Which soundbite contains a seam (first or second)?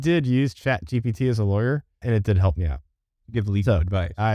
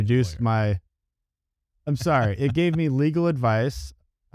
first